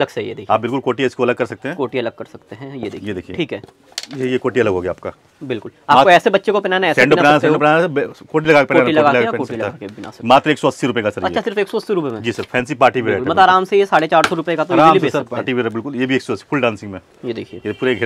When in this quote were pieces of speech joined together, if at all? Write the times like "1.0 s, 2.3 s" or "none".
none